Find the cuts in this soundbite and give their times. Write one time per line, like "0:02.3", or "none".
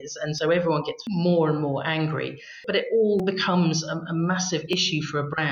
0:02.6
0:03.2